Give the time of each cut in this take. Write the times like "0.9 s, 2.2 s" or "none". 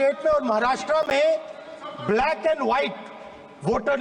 none